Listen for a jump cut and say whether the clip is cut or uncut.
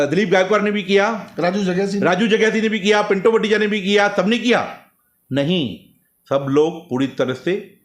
uncut